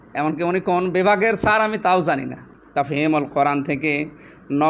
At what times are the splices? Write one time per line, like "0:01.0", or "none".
0:02.6